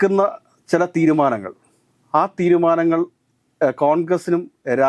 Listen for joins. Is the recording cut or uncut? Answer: uncut